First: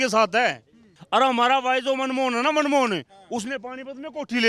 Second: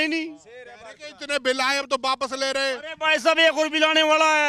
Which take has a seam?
first; 1 cut; at 0.9 s

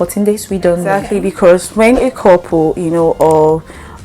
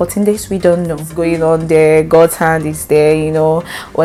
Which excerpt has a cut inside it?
first; 1 cut; at 1.0 s

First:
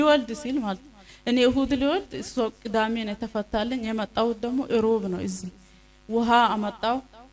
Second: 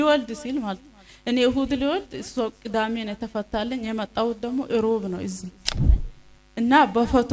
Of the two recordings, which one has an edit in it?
second; 1 cut; at 5.9 s

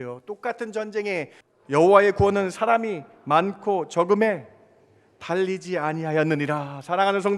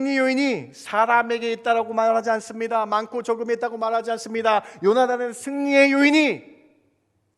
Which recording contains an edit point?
first; 1 cut; at 1.4 s

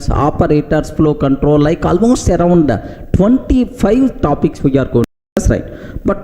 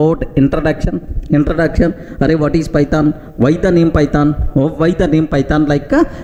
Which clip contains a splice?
first; 1 cut; at 5.1 s

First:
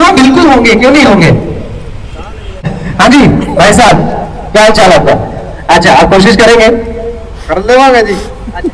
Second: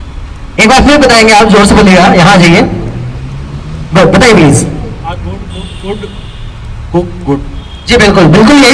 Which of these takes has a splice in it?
first; 1 cut; at 2.6 s

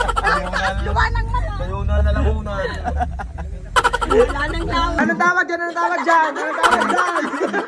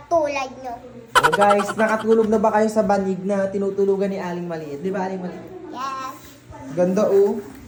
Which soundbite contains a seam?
first; 1 cut; at 4.9 s

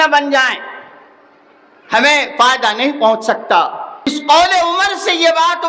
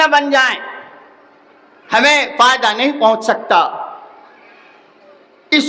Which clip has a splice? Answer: first; 1 cut; at 4.1 s

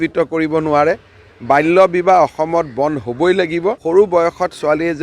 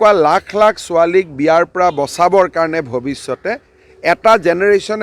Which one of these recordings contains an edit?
first; 1 cut; at 3.8 s

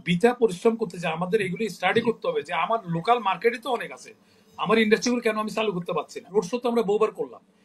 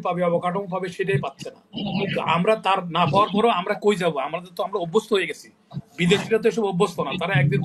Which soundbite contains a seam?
first; 1 cut; at 6.3 s

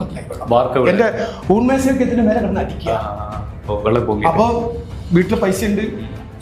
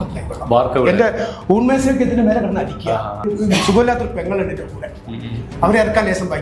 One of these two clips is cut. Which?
second; 1 cut; at 3.2 s

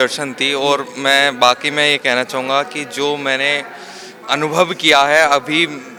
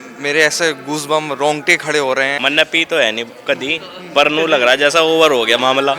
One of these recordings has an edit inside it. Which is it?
second; 1 cut; at 2.3 s

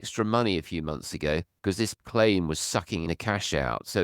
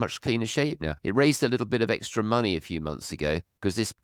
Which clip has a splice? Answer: first; 1 cut; at 3.0 s

